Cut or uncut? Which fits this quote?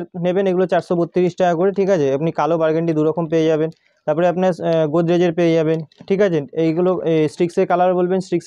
uncut